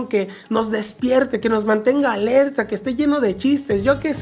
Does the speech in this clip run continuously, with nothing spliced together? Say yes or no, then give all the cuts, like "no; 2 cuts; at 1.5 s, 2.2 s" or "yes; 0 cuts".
yes; 0 cuts